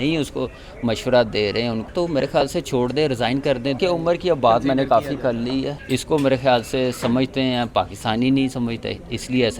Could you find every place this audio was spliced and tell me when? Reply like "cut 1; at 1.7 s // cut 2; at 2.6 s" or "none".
cut 1; at 1.9 s // cut 2; at 3.8 s // cut 3; at 5.8 s